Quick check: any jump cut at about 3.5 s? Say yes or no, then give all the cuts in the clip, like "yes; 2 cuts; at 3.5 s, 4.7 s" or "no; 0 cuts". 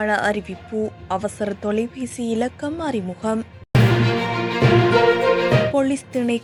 no; 0 cuts